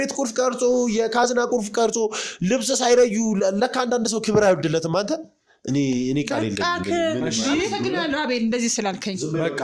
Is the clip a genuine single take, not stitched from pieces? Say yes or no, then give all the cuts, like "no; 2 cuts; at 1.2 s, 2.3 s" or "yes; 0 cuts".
yes; 0 cuts